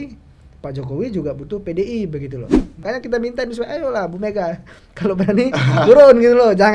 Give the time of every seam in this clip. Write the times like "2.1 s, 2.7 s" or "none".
2.8 s